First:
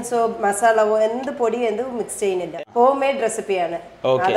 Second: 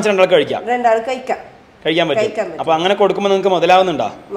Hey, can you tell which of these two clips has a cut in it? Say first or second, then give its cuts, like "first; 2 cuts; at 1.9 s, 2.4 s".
first; 1 cut; at 2.5 s